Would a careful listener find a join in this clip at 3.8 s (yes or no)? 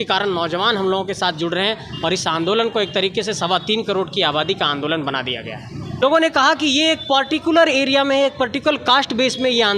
no